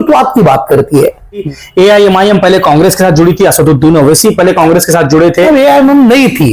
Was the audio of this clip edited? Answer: yes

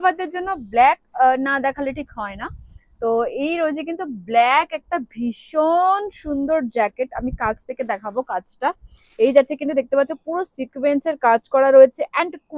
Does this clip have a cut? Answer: no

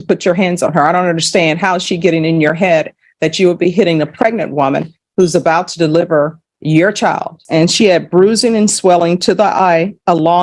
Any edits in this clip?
yes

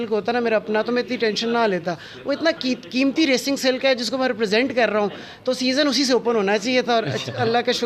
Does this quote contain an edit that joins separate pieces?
no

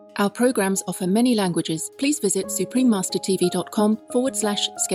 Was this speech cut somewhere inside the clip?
yes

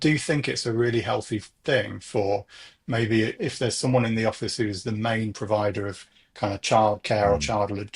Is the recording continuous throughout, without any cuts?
yes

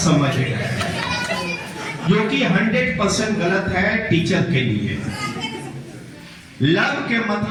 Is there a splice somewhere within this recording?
no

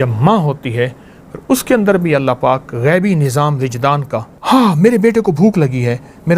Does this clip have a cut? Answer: yes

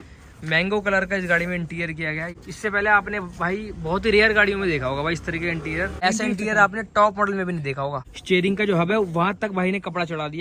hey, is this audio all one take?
no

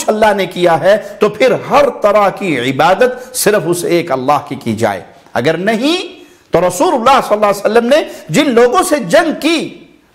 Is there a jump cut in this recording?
no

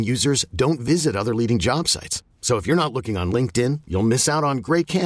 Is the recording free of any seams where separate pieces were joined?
yes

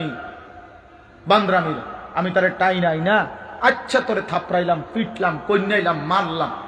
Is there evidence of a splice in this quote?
no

